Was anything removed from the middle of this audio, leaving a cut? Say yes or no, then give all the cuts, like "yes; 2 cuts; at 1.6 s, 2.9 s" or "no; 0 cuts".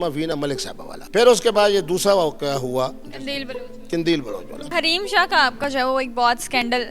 yes; 2 cuts; at 0.9 s, 4.6 s